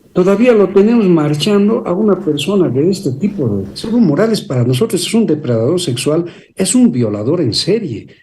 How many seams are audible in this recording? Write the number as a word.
one